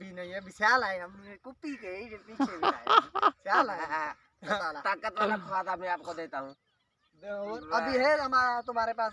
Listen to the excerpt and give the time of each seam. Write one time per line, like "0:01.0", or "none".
0:04.6
0:07.6